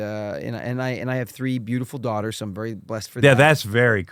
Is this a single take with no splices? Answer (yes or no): yes